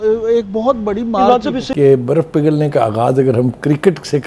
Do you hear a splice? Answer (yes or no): yes